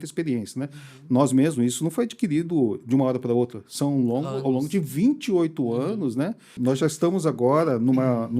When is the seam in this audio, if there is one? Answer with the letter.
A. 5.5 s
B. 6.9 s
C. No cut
B